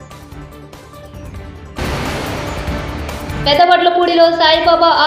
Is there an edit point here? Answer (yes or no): yes